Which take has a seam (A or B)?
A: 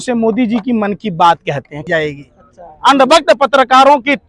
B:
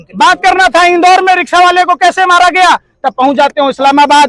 A